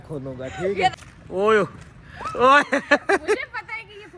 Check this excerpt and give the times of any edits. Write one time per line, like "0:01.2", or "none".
0:00.9